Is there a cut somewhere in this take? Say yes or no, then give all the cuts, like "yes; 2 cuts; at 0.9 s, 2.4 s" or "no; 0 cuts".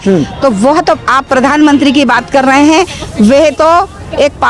no; 0 cuts